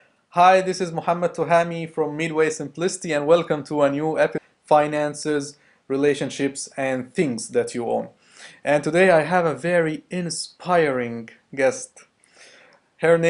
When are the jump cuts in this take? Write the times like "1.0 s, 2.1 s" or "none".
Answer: none